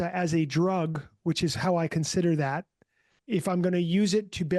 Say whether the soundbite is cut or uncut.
cut